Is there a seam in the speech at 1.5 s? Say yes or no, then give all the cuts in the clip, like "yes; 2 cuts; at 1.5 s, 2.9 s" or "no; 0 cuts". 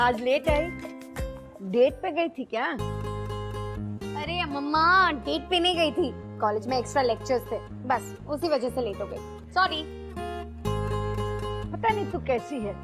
no; 0 cuts